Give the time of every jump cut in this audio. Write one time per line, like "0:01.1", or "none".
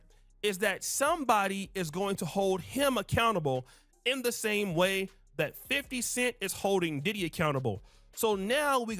none

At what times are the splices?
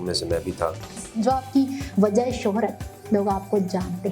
0:01.0

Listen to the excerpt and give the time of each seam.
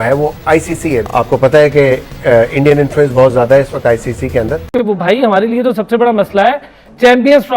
0:04.7

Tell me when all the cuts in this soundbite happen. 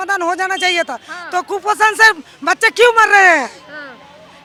none

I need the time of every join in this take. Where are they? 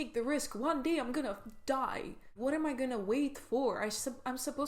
0:02.3

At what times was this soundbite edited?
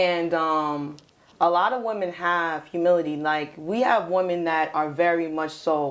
none

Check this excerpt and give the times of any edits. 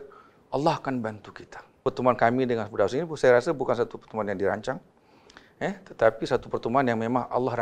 0:01.8

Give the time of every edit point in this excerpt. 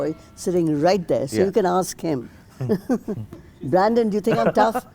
none

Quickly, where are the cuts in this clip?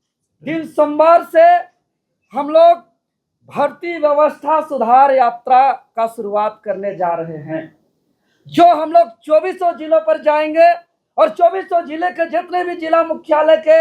none

